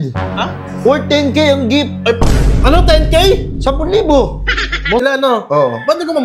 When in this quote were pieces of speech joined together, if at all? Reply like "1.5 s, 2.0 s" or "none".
5.0 s